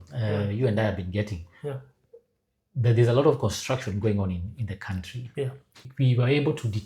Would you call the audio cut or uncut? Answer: cut